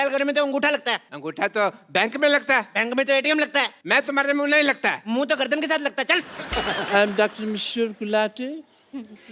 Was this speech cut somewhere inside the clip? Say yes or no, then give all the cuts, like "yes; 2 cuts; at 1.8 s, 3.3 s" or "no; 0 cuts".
yes; 2 cuts; at 3.8 s, 6.4 s